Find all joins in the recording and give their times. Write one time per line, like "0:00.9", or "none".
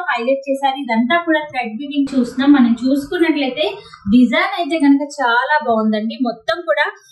0:02.1